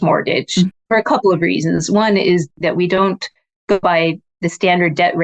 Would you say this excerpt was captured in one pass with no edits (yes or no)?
no